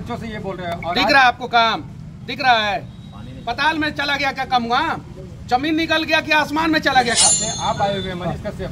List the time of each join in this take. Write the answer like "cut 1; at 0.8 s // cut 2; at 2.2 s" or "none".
cut 1; at 7.2 s